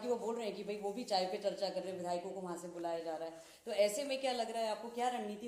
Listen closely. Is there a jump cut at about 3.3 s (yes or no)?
no